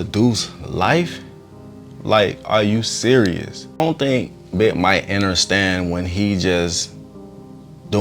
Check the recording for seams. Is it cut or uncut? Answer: cut